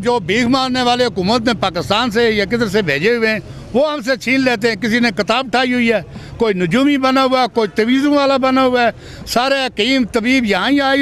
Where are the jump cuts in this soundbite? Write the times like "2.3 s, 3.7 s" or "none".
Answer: none